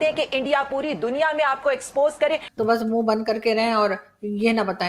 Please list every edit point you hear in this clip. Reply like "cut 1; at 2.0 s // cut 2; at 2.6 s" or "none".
cut 1; at 2.5 s

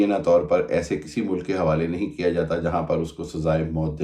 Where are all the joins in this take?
none

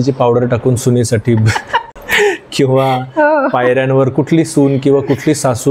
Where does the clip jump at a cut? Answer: cut 1; at 2.0 s

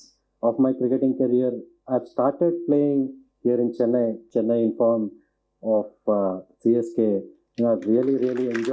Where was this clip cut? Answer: cut 1; at 4.2 s

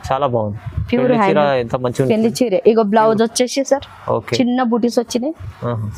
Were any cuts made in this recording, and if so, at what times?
none

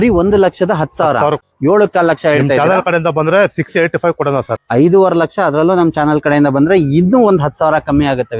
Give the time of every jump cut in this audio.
cut 1; at 1.5 s // cut 2; at 4.6 s

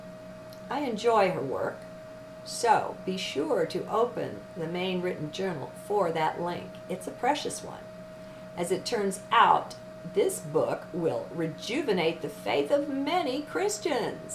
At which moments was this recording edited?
none

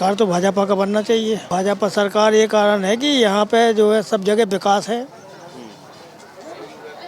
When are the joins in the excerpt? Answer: cut 1; at 1.4 s

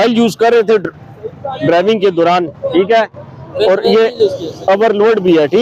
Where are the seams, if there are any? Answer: none

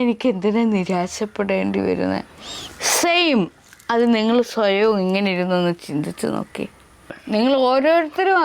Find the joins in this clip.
cut 1; at 7.2 s

